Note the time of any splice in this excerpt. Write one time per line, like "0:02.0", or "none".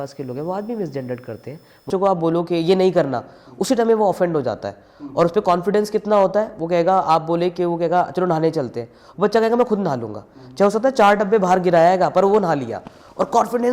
0:01.9

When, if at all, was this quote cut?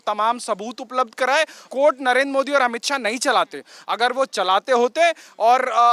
none

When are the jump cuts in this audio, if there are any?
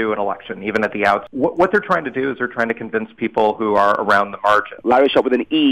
0:01.3
0:04.8

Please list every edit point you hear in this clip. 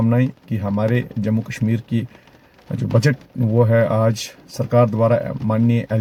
none

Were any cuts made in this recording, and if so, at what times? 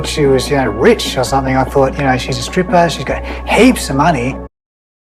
none

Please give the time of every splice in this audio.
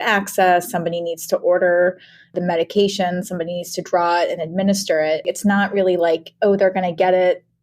0:02.4
0:05.3

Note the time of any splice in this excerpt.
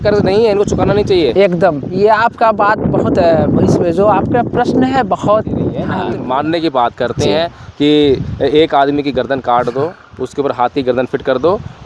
0:05.9

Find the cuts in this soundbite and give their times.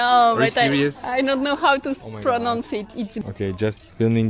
0:03.2

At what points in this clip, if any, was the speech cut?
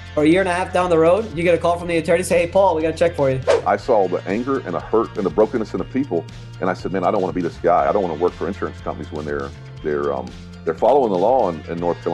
0:03.6

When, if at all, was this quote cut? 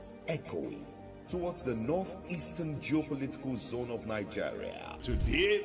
none

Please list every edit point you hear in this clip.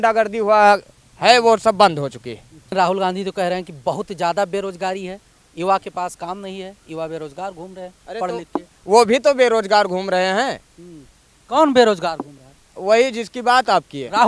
0:02.7

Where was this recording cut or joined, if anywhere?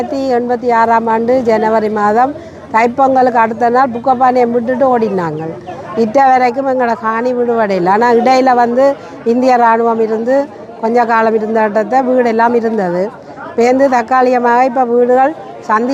none

